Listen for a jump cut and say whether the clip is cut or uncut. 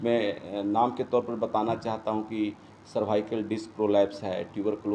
uncut